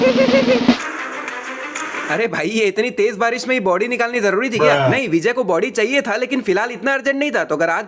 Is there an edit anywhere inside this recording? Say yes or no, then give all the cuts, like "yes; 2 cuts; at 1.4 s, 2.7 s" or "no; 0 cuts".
yes; 1 cut; at 0.9 s